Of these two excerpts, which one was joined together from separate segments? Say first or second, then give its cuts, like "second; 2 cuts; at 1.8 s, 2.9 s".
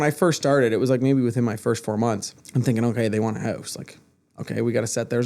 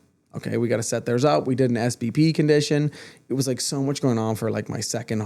first; 1 cut; at 2.3 s